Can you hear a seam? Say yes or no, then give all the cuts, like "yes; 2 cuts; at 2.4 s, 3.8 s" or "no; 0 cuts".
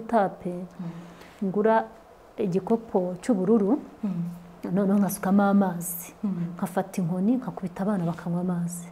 no; 0 cuts